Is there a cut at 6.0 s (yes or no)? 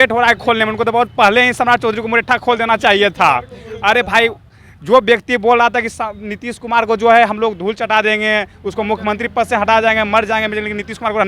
no